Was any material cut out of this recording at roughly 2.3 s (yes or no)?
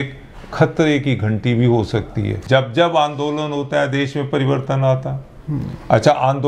yes